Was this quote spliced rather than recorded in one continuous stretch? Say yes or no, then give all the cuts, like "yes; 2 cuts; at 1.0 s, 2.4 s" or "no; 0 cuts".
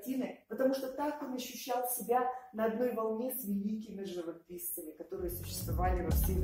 no; 0 cuts